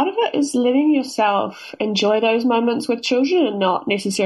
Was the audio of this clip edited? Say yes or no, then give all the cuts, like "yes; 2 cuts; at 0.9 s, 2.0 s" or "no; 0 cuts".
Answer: no; 0 cuts